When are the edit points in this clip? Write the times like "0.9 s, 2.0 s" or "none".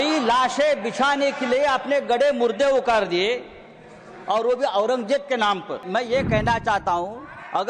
5.8 s